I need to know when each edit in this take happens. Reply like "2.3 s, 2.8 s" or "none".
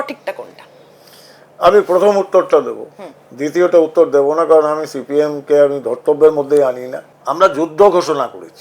none